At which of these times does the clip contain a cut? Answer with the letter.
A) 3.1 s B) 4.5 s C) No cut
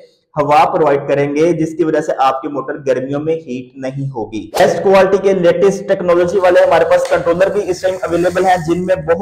B